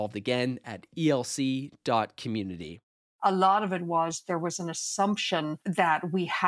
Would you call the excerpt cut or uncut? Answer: cut